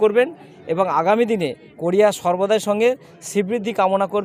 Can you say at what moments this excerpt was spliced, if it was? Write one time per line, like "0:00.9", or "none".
none